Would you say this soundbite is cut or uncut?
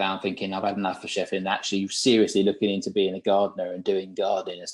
uncut